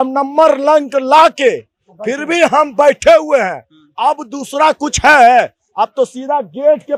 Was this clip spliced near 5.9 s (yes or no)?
no